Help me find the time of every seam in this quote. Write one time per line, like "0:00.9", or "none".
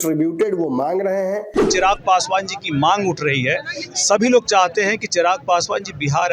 0:01.7